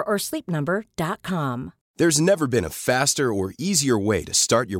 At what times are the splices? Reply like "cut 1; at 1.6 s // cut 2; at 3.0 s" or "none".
cut 1; at 1.8 s